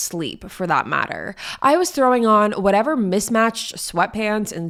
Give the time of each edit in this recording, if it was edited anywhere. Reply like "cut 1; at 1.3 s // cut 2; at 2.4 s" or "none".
none